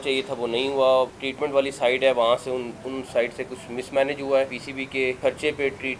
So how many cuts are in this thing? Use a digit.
2